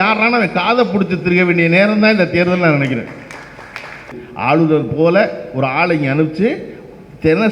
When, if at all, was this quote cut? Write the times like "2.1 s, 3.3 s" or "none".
4.2 s